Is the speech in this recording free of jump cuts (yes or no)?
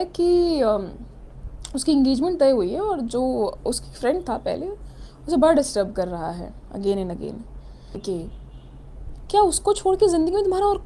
no